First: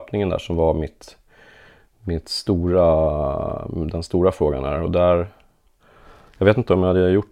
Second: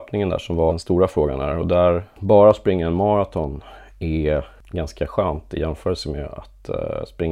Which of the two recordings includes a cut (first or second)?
second